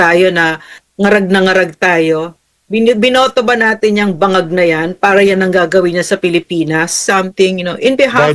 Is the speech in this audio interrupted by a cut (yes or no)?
yes